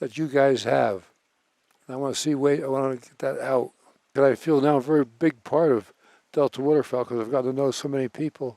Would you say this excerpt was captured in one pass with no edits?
no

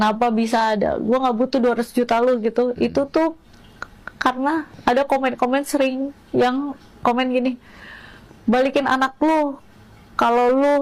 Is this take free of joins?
yes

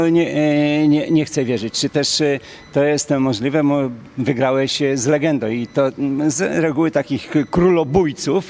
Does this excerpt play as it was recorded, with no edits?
yes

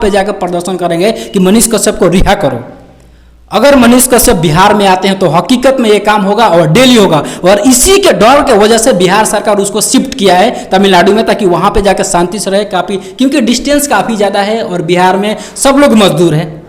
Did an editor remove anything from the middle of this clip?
no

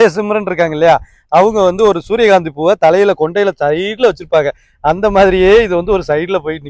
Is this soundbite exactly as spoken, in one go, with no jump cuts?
yes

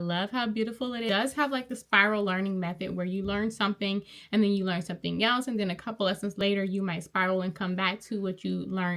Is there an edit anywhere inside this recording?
yes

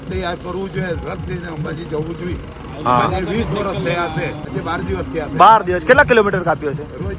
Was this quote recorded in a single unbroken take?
no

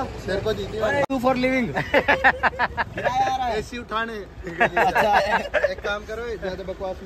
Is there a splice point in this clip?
yes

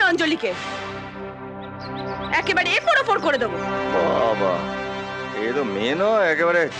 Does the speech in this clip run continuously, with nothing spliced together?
yes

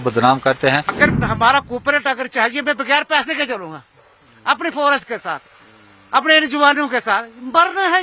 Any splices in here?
yes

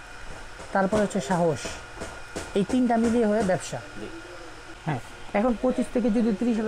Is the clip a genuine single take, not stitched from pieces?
no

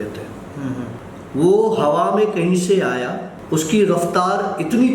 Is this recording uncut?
no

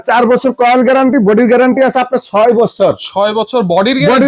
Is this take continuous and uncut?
yes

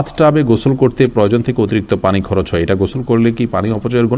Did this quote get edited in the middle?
no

